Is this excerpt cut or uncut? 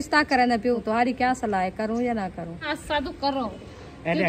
cut